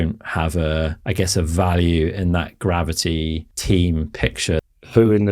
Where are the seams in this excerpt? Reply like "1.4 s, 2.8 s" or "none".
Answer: 1.0 s, 3.5 s, 4.6 s